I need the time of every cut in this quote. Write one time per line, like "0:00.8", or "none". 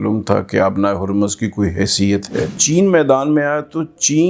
0:02.6